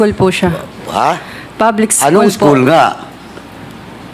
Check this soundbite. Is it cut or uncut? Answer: uncut